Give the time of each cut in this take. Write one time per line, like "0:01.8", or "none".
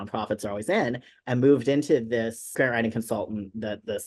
0:02.4